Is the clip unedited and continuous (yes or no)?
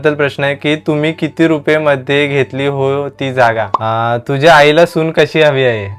no